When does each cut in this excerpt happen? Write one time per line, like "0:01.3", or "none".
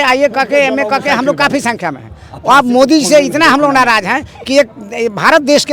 none

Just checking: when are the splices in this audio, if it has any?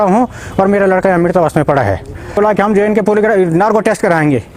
0:02.4

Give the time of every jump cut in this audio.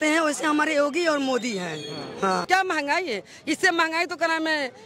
0:02.5

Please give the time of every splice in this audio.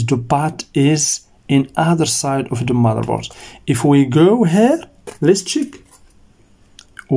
0:05.0

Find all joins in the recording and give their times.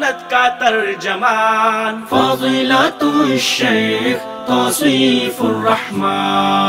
none

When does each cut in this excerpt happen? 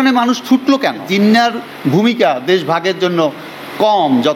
0:01.1

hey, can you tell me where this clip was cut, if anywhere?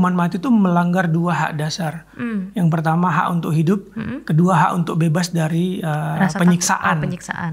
none

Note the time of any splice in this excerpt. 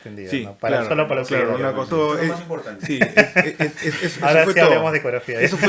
0:01.9

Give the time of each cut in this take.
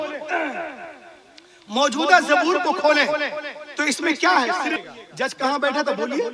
0:04.8

